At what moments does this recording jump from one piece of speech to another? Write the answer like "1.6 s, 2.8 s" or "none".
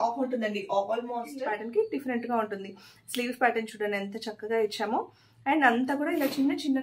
1.3 s